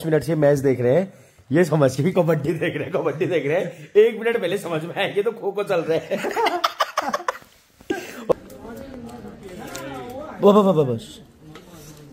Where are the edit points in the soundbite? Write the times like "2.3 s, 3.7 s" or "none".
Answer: 8.3 s